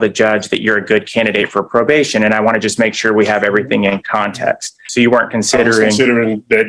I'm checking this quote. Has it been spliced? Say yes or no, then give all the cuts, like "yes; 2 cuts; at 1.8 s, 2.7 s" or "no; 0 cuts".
yes; 1 cut; at 4.8 s